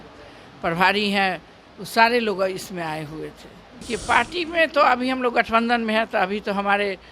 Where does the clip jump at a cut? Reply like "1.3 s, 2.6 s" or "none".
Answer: 3.9 s